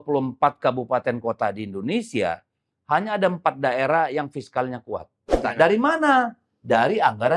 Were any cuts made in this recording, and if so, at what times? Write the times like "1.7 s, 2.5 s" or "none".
5.5 s